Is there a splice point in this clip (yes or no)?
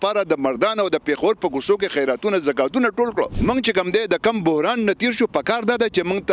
yes